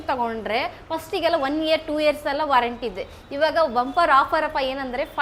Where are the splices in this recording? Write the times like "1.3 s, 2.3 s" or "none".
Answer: none